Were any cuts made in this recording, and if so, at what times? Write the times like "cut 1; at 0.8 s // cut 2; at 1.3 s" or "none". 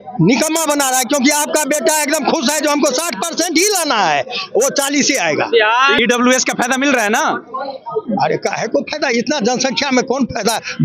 none